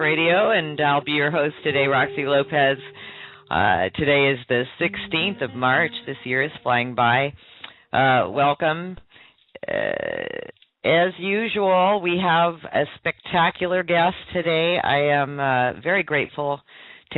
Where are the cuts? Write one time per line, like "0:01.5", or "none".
none